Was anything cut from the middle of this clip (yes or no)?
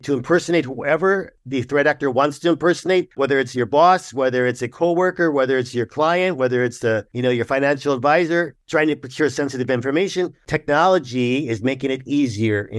yes